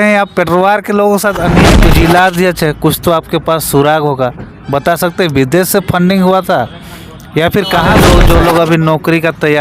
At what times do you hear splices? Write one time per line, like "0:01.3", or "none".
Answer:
0:01.7
0:08.0